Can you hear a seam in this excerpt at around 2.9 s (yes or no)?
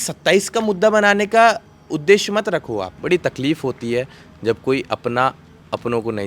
yes